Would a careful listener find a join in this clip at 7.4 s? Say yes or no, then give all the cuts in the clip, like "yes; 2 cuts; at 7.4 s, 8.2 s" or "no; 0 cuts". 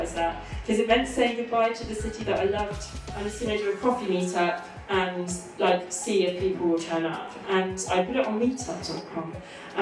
no; 1 cut; at 3.1 s